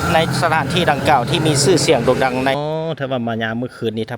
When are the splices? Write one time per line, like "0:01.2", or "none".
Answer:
0:02.5